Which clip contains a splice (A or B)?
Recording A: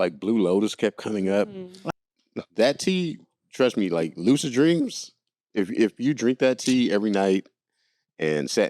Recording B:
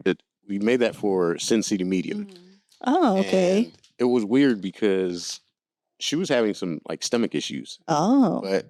A